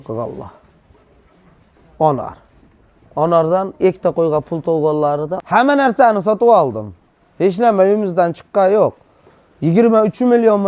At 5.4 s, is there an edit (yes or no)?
yes